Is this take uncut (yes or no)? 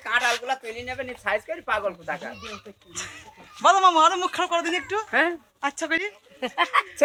yes